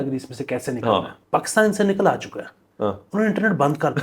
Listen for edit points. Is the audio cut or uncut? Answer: cut